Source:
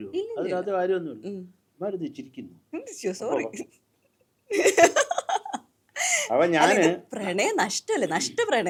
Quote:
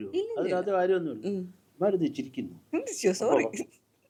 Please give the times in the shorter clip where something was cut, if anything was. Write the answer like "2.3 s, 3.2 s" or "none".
none